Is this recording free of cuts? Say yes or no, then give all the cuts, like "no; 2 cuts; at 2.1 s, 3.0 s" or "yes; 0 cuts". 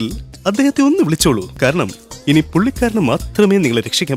yes; 0 cuts